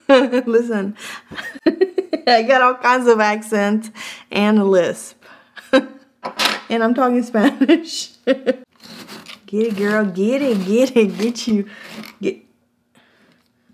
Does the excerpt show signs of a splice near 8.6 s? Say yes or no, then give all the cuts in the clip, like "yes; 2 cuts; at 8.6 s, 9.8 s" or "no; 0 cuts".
yes; 1 cut; at 8.6 s